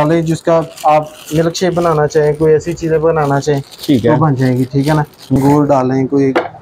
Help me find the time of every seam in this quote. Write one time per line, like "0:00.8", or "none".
0:05.4

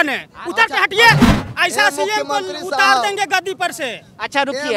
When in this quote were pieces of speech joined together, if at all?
0:01.3

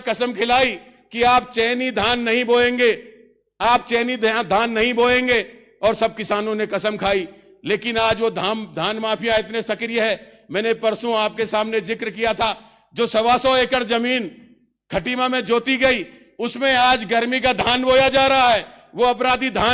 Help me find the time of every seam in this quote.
none

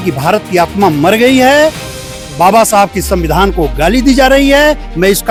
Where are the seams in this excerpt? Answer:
none

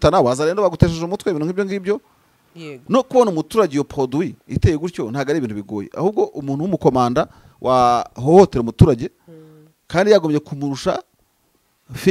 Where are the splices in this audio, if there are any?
none

